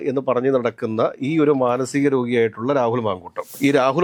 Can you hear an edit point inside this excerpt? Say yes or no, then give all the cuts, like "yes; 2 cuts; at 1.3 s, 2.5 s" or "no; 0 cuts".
no; 0 cuts